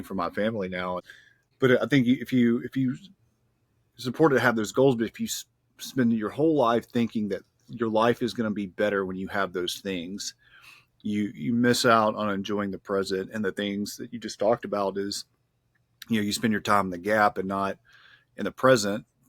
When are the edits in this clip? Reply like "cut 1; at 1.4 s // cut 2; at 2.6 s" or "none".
cut 1; at 1.5 s